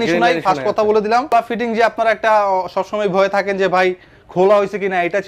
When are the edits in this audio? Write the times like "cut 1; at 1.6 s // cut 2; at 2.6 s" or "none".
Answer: cut 1; at 1.3 s